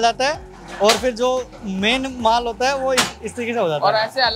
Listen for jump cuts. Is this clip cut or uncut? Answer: uncut